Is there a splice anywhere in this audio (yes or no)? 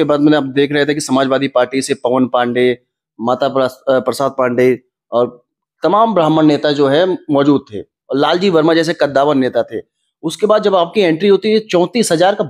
no